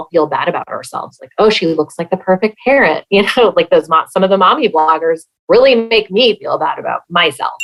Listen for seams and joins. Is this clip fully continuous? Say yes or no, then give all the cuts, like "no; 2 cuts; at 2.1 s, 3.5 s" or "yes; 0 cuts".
yes; 0 cuts